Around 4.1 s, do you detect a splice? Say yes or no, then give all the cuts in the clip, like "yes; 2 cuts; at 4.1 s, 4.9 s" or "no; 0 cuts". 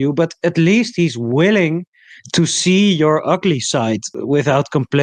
yes; 1 cut; at 4.1 s